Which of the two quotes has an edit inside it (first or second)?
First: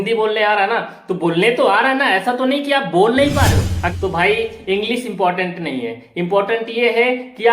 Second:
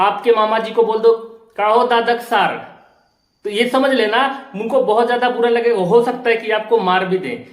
first